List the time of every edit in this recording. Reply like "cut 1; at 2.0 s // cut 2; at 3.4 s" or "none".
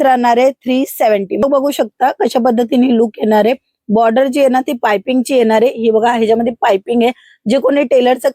cut 1; at 1.4 s